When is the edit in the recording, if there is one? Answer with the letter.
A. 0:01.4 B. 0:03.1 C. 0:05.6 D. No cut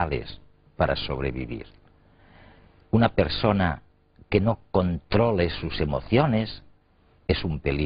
B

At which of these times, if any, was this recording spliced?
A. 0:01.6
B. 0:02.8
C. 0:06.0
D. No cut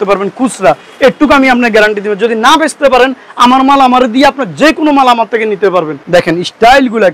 C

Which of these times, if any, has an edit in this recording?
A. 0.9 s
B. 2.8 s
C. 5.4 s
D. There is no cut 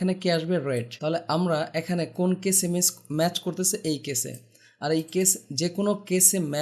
A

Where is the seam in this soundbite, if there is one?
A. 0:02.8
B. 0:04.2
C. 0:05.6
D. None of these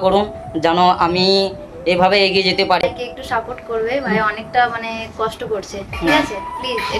A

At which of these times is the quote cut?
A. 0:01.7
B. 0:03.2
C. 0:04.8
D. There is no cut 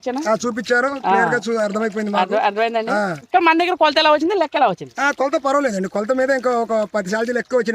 B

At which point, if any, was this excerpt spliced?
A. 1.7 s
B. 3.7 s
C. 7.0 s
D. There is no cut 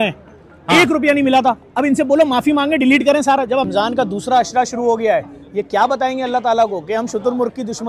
B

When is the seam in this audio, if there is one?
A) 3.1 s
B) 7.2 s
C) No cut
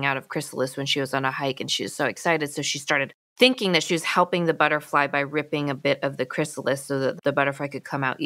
B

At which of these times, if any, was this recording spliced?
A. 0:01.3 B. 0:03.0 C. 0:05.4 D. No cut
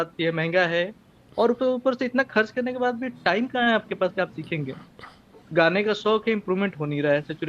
C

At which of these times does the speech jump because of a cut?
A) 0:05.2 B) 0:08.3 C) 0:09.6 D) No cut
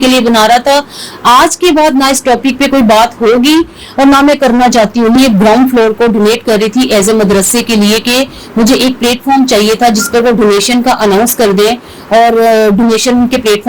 A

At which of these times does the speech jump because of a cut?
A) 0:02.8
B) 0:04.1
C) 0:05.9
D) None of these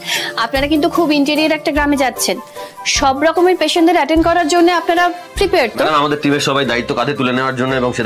C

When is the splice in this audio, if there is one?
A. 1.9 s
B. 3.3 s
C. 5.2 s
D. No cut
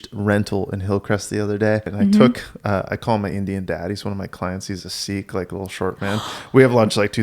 A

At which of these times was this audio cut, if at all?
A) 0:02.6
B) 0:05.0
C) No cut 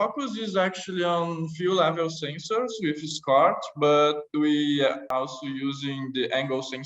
B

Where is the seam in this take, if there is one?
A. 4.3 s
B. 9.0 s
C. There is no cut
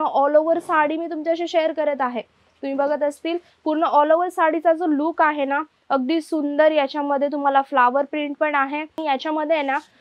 B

